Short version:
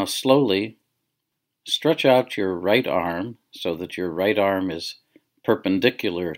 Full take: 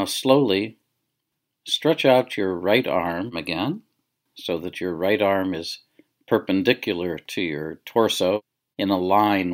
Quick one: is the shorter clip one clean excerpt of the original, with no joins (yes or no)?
no